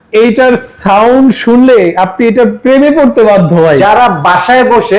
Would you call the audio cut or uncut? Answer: cut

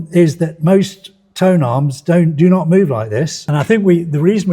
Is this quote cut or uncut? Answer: cut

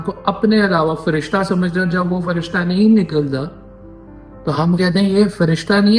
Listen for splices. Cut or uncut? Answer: uncut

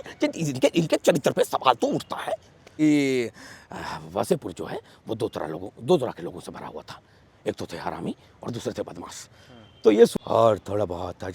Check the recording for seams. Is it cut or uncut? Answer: cut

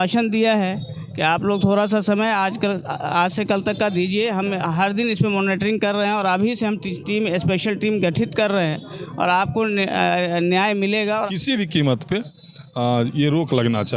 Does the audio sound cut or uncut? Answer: cut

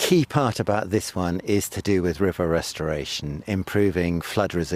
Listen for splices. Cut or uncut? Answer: uncut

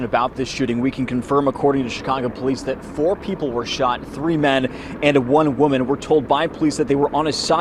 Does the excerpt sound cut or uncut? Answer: uncut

